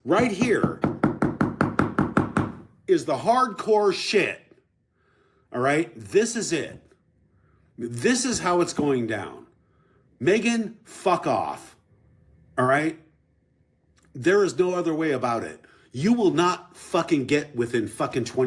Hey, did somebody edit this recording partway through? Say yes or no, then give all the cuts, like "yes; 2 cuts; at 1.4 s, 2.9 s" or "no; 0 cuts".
no; 0 cuts